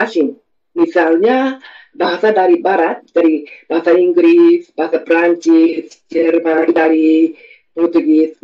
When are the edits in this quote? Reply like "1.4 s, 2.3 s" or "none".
none